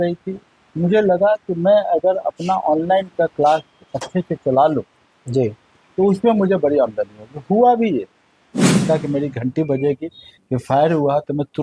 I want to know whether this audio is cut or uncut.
cut